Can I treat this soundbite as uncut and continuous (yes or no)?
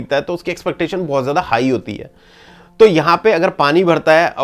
yes